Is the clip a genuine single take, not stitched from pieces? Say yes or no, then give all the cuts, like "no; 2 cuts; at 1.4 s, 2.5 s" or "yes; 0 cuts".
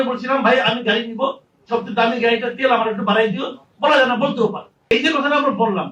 no; 1 cut; at 4.9 s